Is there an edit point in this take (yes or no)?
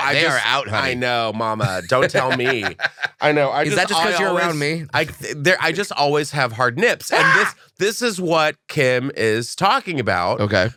no